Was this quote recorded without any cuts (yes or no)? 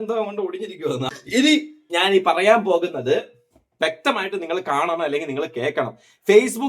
no